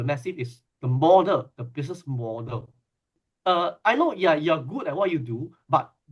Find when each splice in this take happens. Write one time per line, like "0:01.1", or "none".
0:03.1